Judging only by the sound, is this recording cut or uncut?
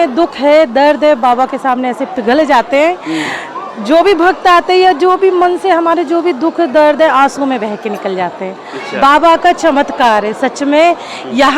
uncut